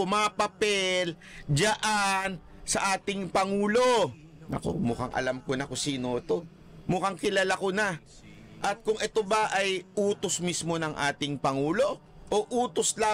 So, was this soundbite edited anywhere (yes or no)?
no